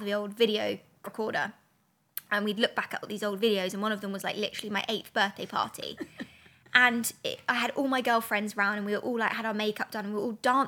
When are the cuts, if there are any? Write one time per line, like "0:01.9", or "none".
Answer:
0:01.0

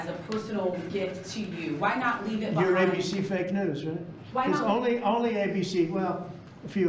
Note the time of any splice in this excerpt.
none

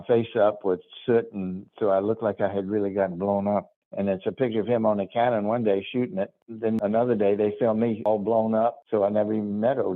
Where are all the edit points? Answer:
0:03.8
0:06.7
0:08.1
0:08.8

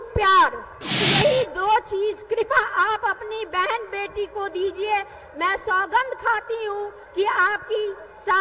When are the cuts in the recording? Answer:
0:01.0

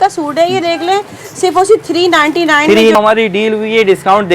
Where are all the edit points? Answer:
0:03.0

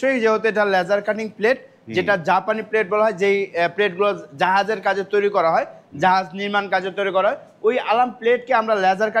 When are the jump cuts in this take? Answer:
none

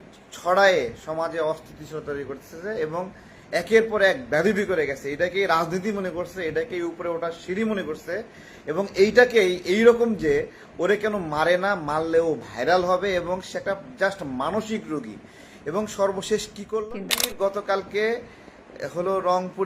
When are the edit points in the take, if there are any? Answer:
0:16.8

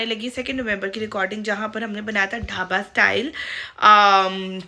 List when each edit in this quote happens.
none

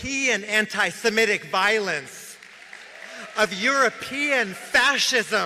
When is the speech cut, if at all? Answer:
none

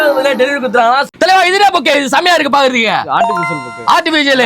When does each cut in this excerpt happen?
0:01.1

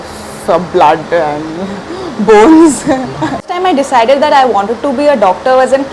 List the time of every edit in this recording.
0:03.4

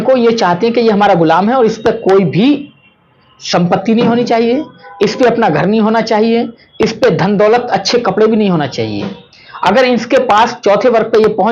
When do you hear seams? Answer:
none

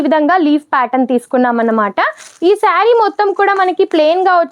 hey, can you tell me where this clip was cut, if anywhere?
none

